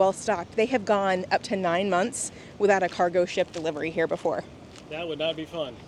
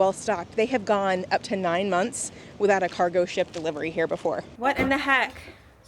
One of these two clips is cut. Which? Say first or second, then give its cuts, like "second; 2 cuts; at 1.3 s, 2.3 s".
second; 1 cut; at 4.5 s